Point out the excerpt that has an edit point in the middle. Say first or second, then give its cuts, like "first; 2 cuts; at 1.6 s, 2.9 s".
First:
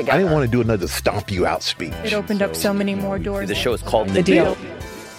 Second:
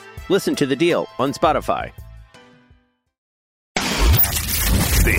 second; 1 cut; at 3.6 s